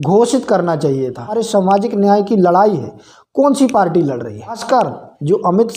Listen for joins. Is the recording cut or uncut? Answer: cut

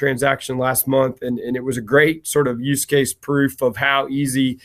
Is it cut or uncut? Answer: uncut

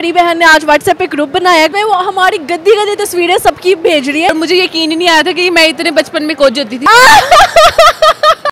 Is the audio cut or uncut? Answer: cut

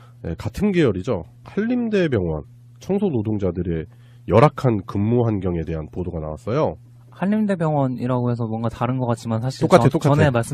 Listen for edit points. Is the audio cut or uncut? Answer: cut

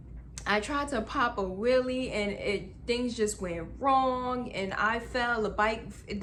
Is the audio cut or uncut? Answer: uncut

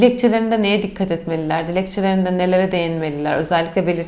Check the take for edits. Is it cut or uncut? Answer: uncut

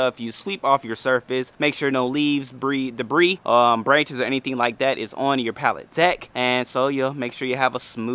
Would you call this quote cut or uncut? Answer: cut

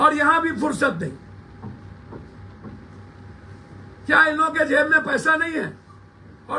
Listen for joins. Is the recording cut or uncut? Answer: uncut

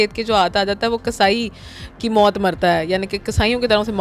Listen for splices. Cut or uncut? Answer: uncut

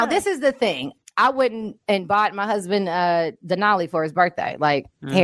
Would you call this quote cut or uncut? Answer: cut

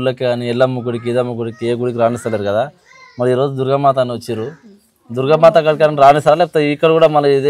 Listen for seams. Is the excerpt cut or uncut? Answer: uncut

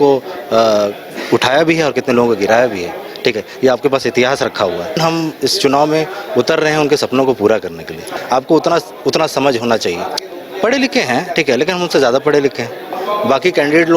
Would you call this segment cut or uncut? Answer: cut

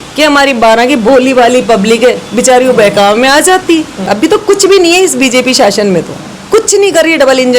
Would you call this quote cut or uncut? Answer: cut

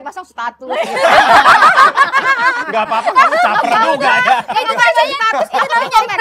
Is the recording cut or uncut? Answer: uncut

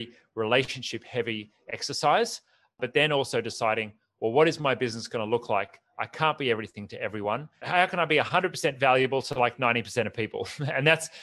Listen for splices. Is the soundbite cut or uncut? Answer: cut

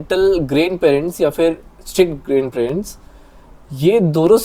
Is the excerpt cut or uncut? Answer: uncut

